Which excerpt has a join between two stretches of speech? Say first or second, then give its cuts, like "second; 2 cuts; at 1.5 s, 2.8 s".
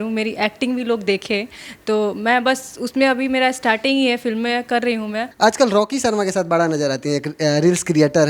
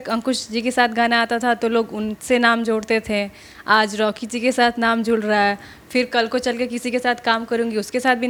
first; 1 cut; at 5.2 s